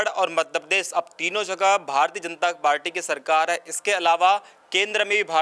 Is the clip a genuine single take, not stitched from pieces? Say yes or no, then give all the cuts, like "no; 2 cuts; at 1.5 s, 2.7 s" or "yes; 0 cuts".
yes; 0 cuts